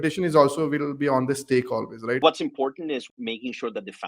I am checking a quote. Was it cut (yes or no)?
yes